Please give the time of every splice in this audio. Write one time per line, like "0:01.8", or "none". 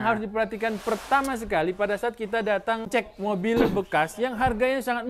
0:02.8